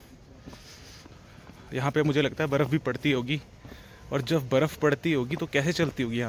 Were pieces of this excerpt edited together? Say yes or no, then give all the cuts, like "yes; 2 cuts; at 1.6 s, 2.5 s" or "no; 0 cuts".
no; 0 cuts